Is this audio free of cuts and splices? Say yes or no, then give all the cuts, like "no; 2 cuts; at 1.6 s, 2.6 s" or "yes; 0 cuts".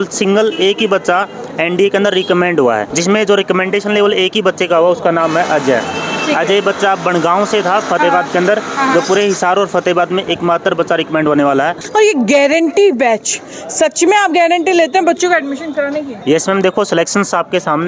no; 2 cuts; at 2.9 s, 11.8 s